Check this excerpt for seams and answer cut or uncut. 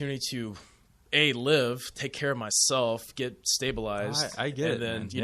uncut